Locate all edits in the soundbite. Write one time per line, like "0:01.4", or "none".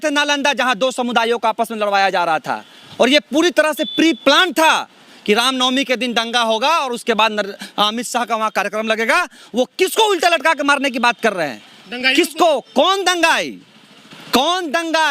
none